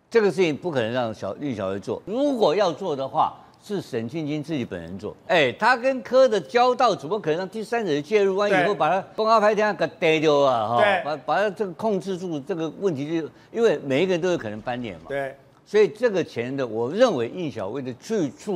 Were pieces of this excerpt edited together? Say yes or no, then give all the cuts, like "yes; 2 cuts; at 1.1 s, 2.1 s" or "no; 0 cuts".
yes; 3 cuts; at 2.0 s, 5.2 s, 9.1 s